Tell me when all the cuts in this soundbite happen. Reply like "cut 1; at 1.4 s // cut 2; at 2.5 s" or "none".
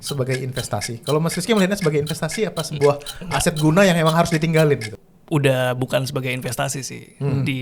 cut 1; at 5.0 s